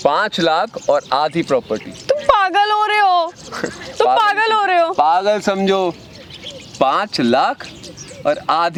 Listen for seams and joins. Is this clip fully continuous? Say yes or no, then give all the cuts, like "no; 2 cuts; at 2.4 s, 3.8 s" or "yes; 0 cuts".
yes; 0 cuts